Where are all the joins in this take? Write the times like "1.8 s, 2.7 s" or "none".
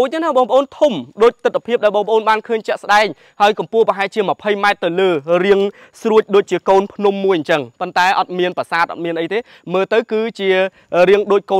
none

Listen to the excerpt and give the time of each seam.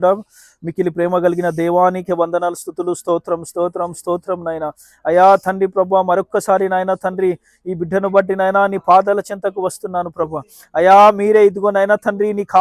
none

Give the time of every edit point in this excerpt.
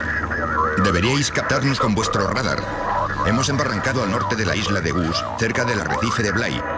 none

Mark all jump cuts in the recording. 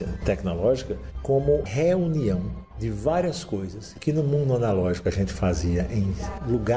1.7 s

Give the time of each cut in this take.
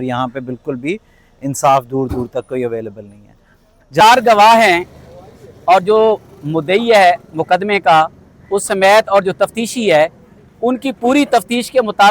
4.0 s

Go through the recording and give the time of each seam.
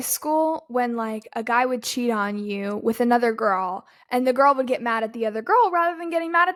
none

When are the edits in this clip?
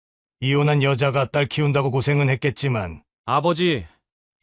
none

